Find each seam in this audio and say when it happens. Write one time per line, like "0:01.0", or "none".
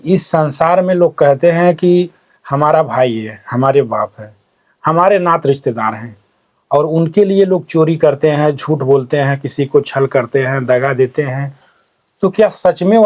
none